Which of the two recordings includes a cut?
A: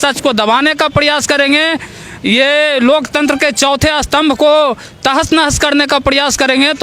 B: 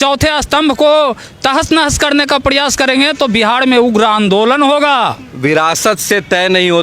B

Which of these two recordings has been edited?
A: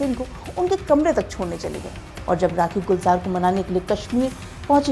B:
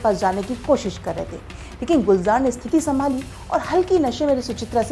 A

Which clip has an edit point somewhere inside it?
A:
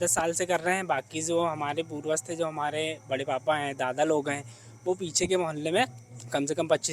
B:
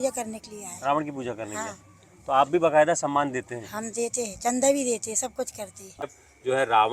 B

